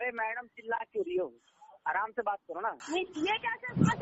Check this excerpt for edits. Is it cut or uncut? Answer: cut